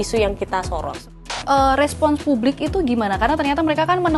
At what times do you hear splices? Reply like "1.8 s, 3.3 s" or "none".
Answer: 1.1 s

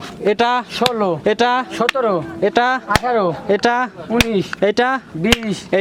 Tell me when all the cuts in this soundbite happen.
none

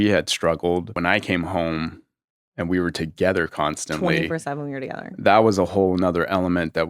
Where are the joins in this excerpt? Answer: 0.9 s

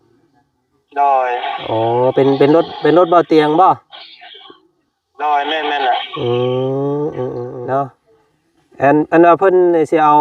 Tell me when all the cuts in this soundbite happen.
7.5 s

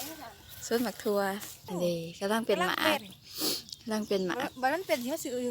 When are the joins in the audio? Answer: 1.6 s

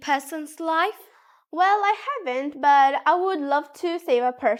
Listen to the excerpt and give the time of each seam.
none

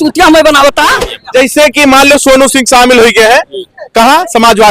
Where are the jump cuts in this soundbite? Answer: 1.1 s

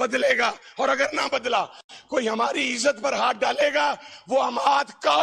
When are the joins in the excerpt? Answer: none

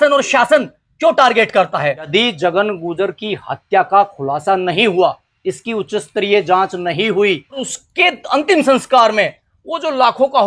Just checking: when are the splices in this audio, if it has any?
2.1 s, 7.7 s

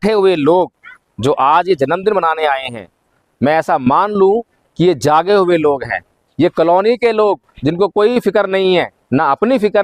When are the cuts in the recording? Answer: none

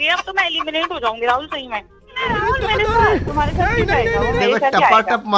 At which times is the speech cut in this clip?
2.2 s

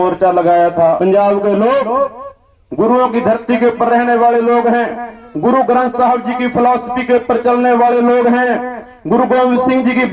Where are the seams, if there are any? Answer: 1.0 s

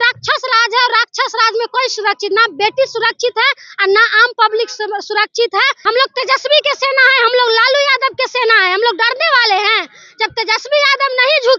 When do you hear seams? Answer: 5.8 s

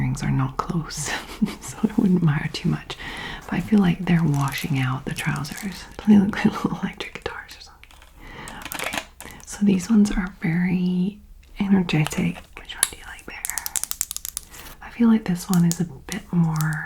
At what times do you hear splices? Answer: 5.9 s, 12.5 s

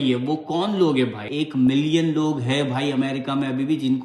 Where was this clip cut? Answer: 1.2 s

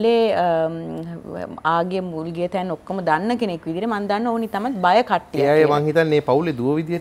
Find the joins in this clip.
none

